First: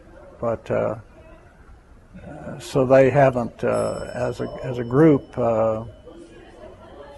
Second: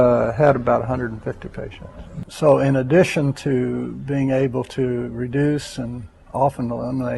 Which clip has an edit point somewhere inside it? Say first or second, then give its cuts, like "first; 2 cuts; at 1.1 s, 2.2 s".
second; 1 cut; at 2.2 s